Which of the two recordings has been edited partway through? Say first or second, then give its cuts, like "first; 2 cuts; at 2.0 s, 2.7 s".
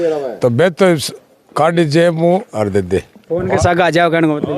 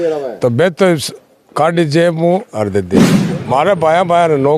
second; 1 cut; at 3.2 s